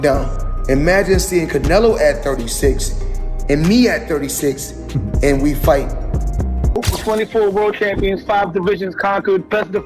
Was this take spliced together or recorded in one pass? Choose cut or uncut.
cut